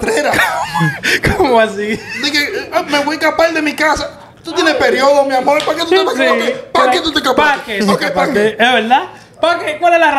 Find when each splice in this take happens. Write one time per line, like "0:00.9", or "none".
none